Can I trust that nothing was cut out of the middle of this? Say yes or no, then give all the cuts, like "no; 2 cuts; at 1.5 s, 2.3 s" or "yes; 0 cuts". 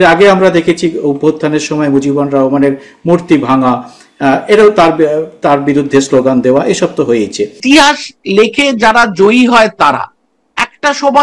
no; 1 cut; at 7.6 s